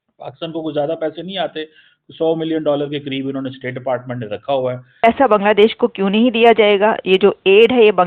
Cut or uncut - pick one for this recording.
cut